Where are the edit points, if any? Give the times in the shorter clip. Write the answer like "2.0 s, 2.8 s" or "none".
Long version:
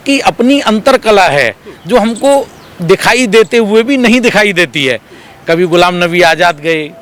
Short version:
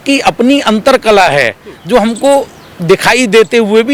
none

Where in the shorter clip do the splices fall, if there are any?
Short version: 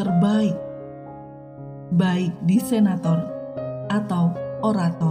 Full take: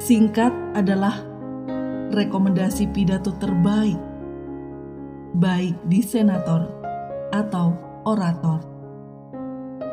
none

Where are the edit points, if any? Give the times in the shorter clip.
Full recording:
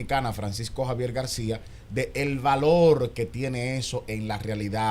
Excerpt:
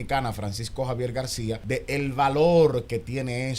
1.6 s

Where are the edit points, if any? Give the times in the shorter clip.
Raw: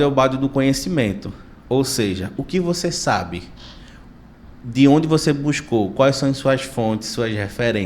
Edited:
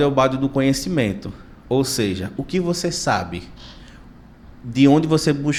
none

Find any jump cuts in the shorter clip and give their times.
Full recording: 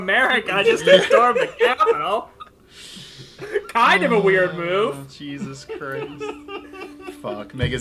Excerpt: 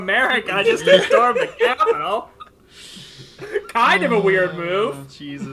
none

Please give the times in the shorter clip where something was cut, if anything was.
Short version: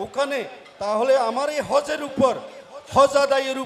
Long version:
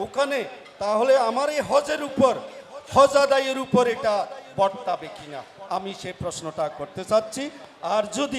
none

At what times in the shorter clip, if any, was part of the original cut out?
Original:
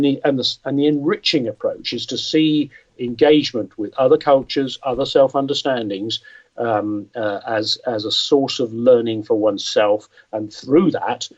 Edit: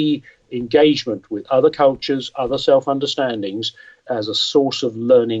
4.0 s

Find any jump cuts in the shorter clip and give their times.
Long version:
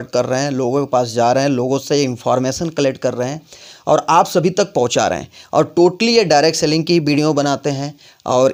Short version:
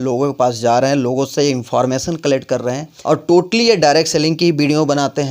2.9 s

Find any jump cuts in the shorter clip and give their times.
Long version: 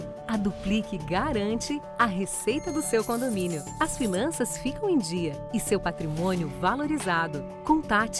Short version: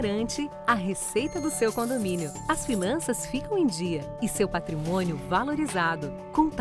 none

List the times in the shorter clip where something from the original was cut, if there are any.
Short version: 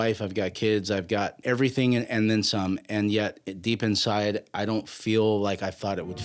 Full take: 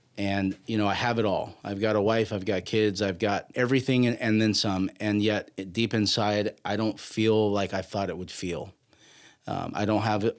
none

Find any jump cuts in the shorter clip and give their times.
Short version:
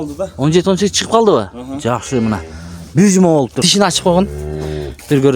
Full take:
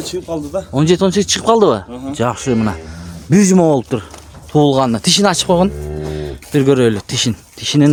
3.6 s

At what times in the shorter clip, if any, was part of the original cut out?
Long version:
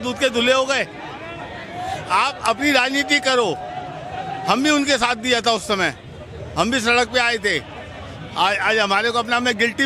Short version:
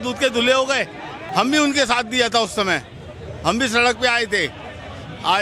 1.2 s

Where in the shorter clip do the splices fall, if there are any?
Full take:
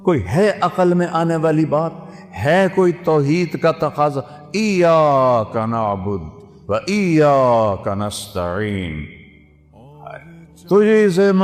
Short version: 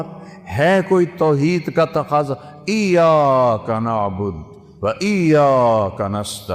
none

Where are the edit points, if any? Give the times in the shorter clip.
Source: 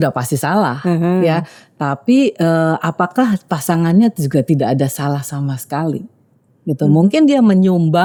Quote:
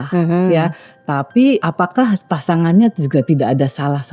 1.6 s

